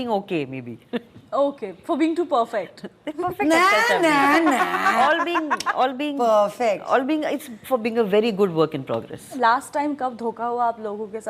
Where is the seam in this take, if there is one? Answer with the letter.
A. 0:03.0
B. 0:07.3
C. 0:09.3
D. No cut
C